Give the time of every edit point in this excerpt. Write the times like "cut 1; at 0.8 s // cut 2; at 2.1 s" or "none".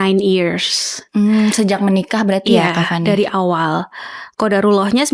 none